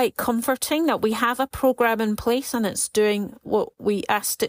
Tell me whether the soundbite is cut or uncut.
uncut